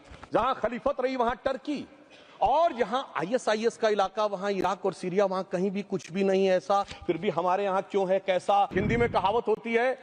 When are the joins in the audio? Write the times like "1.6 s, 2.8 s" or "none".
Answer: 8.7 s